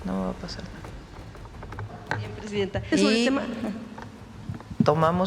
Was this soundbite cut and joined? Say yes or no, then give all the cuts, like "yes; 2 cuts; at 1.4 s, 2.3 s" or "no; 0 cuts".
yes; 1 cut; at 2.9 s